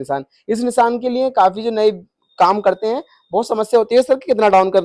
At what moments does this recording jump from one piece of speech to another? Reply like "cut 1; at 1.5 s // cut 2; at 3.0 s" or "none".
none